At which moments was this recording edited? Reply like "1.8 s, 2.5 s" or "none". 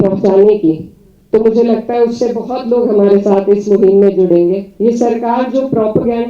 4.7 s

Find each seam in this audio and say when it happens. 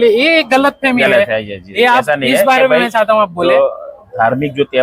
none

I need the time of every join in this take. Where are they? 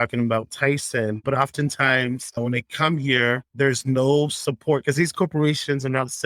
1.2 s

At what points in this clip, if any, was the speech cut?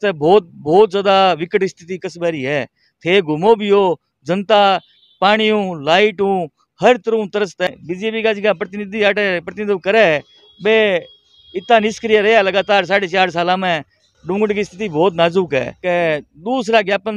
7.7 s, 14.1 s, 15.7 s

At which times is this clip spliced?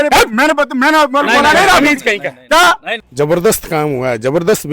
3.0 s

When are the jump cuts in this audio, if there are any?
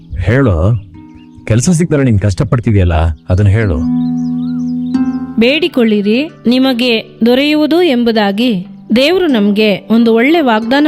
5.3 s

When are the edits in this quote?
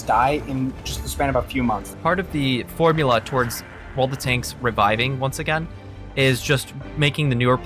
0.9 s, 1.9 s

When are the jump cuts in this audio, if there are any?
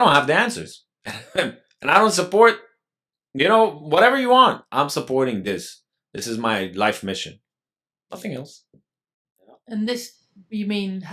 none

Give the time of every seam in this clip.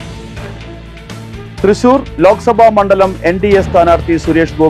0.9 s

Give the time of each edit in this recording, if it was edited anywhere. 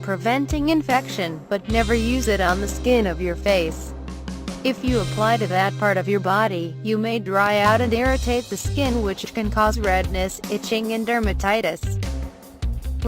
7.7 s

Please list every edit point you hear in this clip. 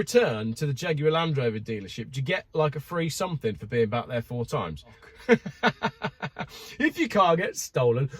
5.0 s

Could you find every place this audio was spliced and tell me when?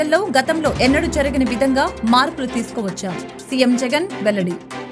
none

